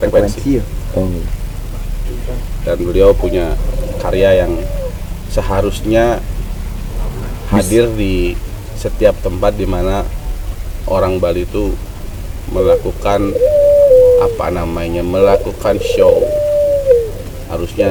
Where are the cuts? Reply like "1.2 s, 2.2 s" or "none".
none